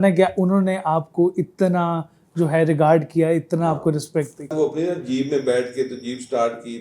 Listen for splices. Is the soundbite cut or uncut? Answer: cut